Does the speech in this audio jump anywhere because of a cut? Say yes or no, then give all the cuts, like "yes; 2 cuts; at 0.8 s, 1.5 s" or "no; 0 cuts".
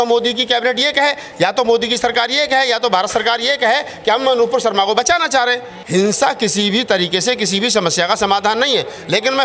yes; 1 cut; at 5.8 s